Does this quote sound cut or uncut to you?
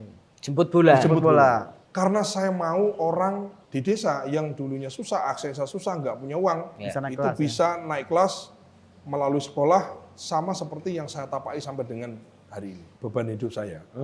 cut